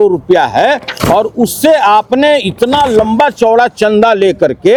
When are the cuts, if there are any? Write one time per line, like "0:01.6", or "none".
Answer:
none